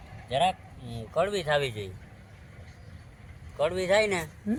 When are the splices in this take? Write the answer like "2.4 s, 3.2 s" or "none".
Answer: none